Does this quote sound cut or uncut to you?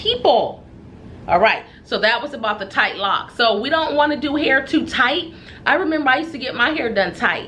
uncut